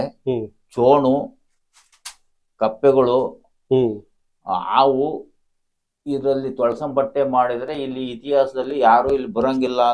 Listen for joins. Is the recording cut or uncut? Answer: uncut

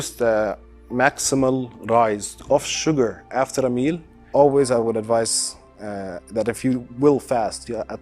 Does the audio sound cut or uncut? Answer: cut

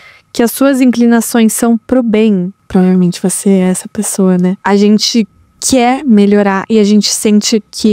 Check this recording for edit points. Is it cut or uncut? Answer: cut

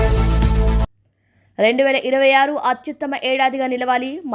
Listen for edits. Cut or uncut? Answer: uncut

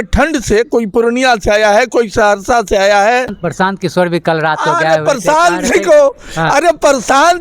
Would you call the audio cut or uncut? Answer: cut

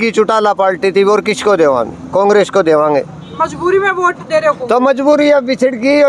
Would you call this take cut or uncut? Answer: uncut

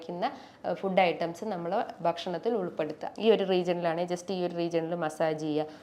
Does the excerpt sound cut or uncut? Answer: cut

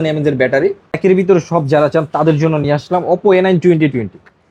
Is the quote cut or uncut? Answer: cut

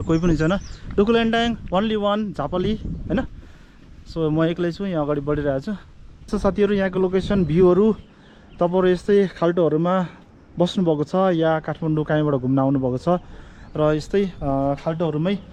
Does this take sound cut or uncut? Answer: cut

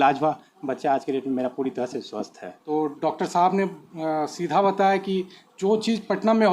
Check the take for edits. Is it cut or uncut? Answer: cut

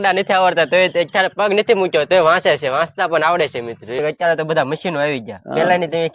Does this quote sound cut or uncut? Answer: cut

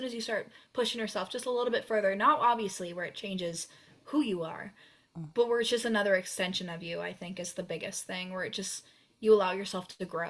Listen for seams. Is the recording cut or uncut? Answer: uncut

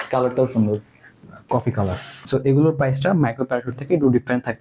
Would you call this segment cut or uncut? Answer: cut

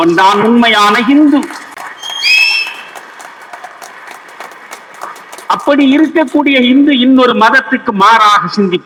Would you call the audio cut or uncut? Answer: uncut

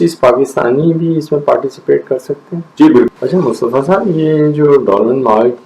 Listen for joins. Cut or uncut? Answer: cut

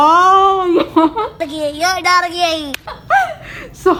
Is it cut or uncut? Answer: uncut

